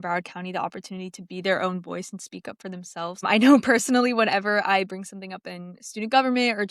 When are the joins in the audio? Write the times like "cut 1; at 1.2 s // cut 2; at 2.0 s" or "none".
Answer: cut 1; at 3.2 s